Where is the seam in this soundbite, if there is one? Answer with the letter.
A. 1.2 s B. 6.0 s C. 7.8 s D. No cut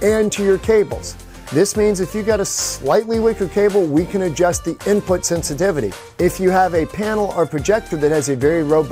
B